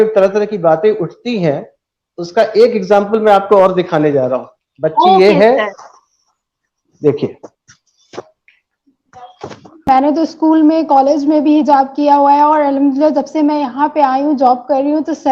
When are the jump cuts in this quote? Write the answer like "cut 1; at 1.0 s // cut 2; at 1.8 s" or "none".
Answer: none